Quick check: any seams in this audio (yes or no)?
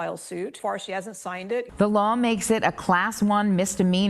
yes